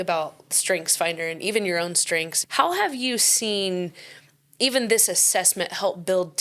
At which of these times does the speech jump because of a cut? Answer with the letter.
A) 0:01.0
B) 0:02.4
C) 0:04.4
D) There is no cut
B